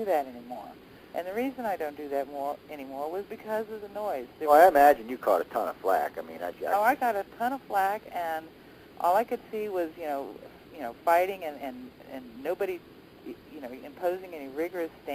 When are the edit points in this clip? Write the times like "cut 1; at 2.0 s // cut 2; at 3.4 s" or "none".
cut 1; at 13.0 s